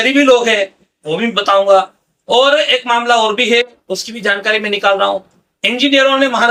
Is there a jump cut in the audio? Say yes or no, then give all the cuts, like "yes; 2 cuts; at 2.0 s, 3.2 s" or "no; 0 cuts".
no; 0 cuts